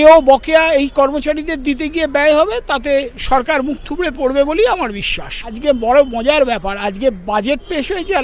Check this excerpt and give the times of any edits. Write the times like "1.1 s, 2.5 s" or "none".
5.6 s